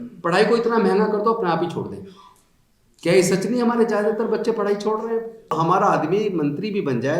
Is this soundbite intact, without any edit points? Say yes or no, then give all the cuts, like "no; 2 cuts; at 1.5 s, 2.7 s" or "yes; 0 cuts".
no; 1 cut; at 5.5 s